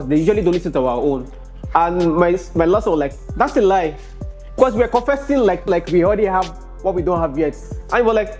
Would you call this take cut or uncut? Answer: cut